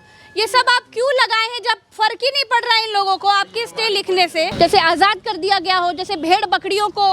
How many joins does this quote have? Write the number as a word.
one